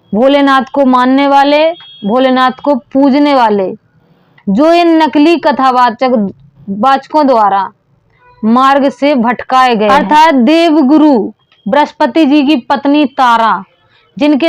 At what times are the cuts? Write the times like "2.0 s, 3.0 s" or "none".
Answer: 9.9 s